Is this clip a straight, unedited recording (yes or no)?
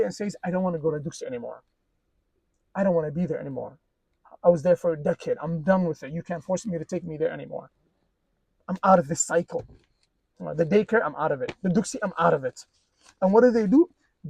yes